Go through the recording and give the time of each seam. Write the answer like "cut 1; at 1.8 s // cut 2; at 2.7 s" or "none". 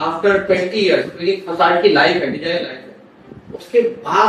none